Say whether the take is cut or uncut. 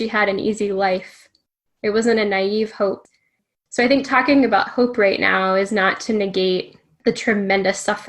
cut